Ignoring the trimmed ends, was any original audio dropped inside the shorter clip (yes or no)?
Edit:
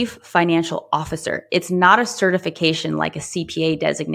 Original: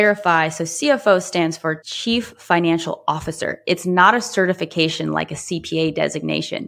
no